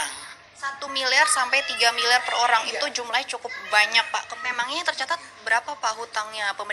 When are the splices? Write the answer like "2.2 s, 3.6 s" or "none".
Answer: 4.3 s